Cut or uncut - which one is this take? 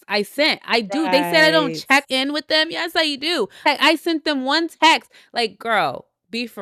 uncut